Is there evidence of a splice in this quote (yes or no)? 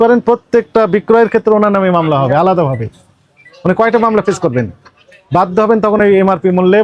no